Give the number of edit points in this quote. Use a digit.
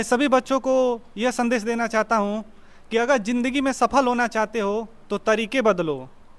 0